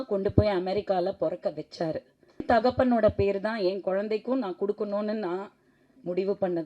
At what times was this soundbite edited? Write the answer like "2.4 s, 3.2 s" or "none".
2.4 s